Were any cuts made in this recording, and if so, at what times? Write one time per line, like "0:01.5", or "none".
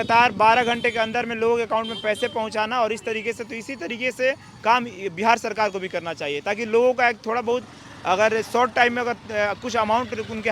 none